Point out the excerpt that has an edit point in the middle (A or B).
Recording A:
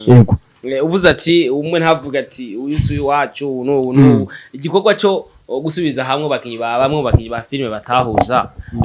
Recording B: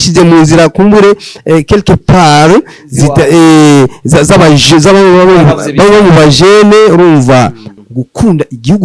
B